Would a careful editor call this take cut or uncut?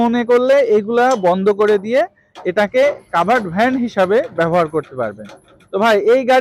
uncut